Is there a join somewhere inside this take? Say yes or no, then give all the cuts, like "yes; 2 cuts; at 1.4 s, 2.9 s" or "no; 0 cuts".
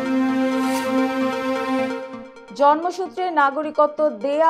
yes; 1 cut; at 2.2 s